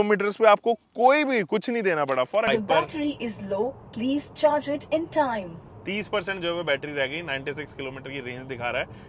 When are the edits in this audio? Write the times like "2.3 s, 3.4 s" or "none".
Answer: 2.5 s